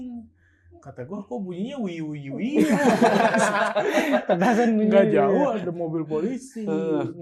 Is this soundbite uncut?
yes; 0 cuts

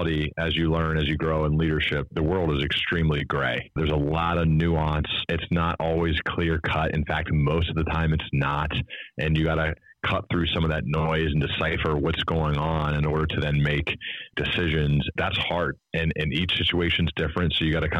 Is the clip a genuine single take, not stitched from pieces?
no; 6 cuts; at 2.1 s, 3.8 s, 5.2 s, 9.8 s, 14.3 s, 15.1 s

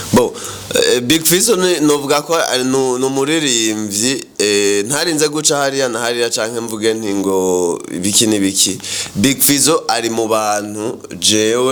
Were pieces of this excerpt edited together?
no; 0 cuts

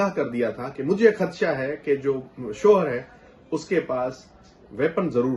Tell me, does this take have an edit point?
no; 0 cuts

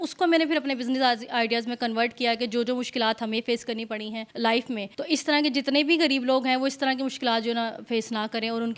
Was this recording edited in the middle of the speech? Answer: yes; 2 cuts; at 4.2 s, 4.9 s

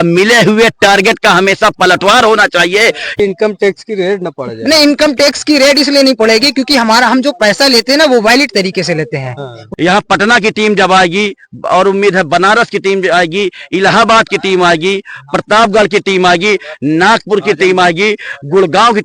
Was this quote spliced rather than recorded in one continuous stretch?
yes; 2 cuts; at 3.2 s, 9.6 s

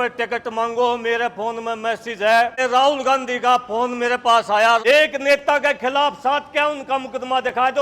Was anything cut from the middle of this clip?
yes; 2 cuts; at 2.6 s, 4.8 s

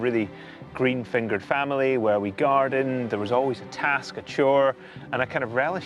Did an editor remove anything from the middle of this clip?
yes; 1 cut; at 3.7 s

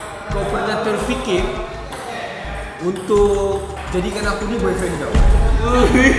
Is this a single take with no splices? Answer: yes; 0 cuts

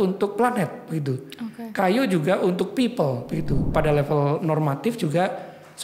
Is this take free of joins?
no; 1 cut; at 3.7 s

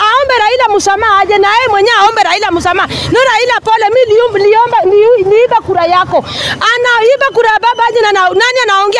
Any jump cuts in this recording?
no; 0 cuts

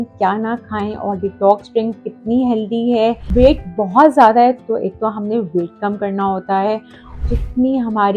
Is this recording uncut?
no; 2 cuts; at 3.2 s, 7.2 s

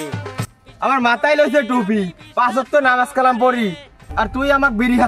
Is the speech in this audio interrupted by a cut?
no; 0 cuts

